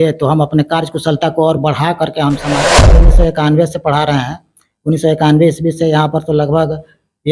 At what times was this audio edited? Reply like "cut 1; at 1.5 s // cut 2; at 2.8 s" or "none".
cut 1; at 3.0 s